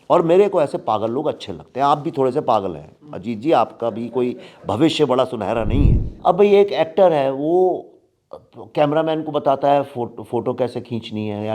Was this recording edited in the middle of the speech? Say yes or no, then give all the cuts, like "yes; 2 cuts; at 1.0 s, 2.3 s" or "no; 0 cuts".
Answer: yes; 1 cut; at 6.0 s